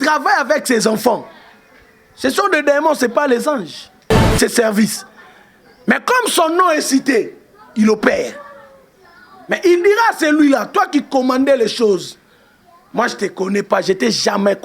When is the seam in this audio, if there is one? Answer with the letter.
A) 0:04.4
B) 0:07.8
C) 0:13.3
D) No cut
A